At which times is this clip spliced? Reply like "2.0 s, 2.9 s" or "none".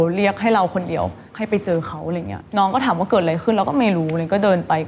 1.2 s, 2.3 s